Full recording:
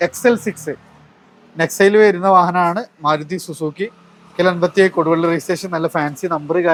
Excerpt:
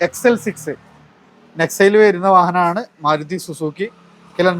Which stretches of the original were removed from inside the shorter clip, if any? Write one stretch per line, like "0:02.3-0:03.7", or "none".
none